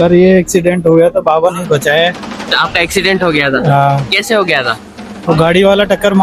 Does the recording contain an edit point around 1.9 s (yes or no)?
no